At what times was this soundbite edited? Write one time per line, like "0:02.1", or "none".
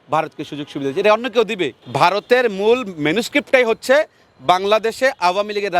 0:01.8

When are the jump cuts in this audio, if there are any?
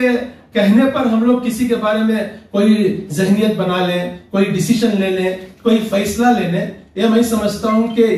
none

